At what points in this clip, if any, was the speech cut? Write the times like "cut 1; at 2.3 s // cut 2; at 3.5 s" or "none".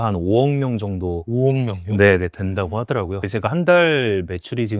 cut 1; at 3.3 s